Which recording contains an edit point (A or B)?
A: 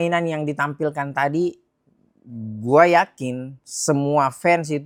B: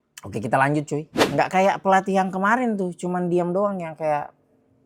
B